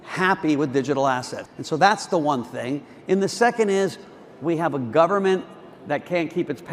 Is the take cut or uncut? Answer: cut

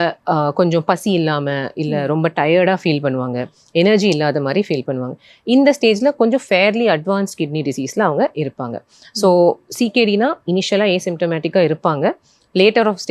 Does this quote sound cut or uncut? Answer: uncut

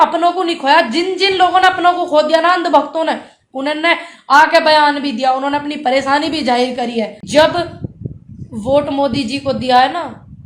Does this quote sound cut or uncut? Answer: cut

